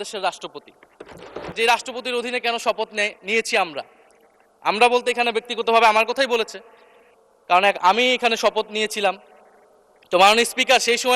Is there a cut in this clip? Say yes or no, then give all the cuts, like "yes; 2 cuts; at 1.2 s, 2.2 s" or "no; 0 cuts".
yes; 1 cut; at 1.4 s